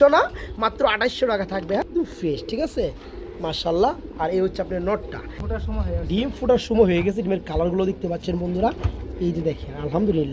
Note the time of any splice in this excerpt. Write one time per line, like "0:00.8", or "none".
0:01.9
0:05.4